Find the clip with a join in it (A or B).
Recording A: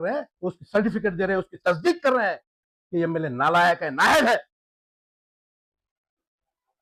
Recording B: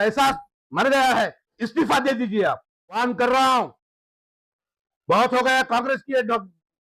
B